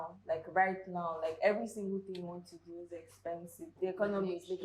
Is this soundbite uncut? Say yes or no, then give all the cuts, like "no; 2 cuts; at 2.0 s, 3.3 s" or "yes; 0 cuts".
yes; 0 cuts